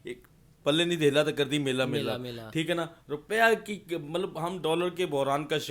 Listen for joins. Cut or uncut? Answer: uncut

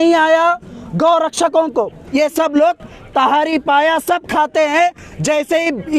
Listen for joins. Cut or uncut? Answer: cut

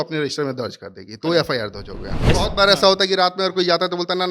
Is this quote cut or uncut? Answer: cut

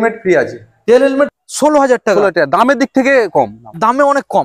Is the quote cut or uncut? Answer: cut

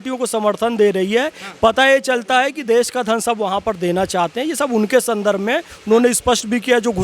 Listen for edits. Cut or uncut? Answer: uncut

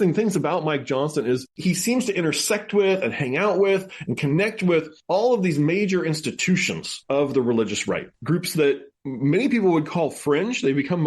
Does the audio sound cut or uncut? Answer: cut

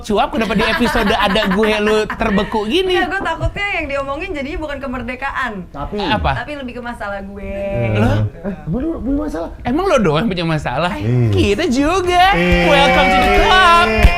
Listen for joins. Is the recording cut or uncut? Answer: uncut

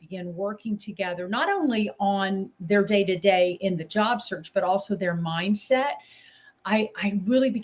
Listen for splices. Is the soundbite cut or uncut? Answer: cut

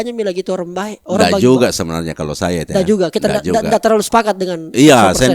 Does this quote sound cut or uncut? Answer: uncut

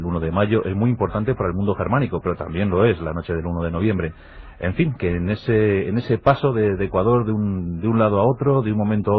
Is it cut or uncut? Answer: uncut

